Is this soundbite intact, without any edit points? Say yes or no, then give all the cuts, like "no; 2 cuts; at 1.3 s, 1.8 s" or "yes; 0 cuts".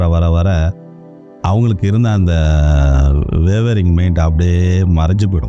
yes; 0 cuts